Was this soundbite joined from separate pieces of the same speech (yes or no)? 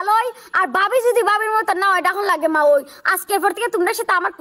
no